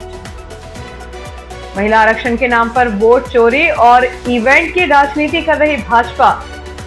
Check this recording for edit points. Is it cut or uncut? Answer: cut